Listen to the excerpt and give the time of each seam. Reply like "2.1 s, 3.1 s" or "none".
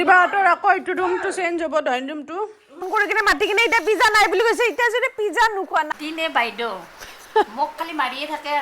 2.9 s, 5.9 s